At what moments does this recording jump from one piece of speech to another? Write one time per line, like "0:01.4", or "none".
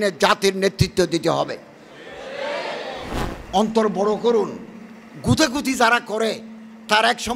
0:03.3